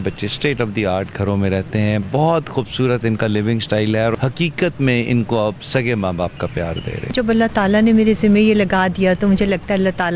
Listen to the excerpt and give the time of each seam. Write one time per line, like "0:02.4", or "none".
0:02.1
0:04.1
0:07.1